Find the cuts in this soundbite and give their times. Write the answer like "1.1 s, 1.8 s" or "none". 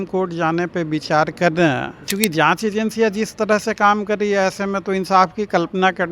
2.1 s